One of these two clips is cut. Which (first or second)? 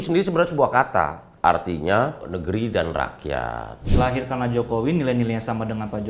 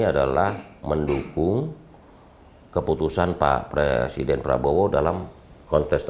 first